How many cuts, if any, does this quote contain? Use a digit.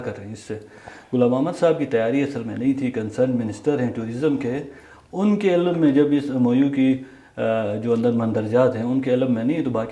0